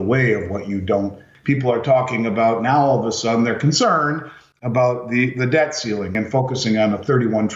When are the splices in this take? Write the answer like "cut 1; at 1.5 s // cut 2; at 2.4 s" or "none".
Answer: cut 1; at 1.3 s // cut 2; at 6.1 s